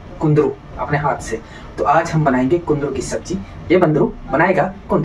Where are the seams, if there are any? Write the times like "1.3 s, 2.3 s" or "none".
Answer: none

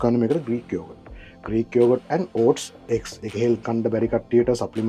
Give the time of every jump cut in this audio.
3.2 s

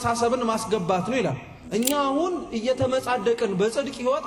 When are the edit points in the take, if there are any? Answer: 1.6 s

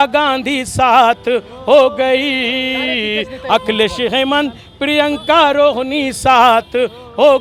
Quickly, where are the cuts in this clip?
none

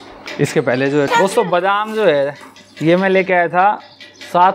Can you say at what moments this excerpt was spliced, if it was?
1.1 s

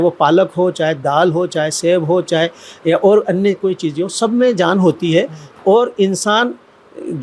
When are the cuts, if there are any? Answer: none

